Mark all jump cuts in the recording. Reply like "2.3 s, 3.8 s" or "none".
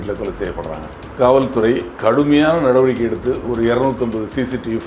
1.0 s, 1.9 s